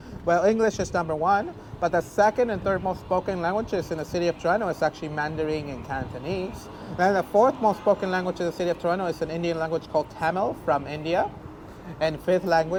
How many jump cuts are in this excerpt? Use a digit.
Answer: 0